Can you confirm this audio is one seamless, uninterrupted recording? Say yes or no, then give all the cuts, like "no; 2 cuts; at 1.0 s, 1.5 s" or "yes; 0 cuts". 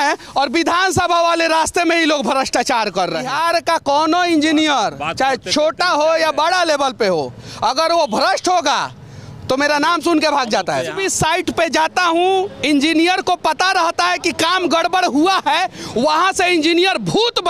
no; 2 cuts; at 3.3 s, 11.0 s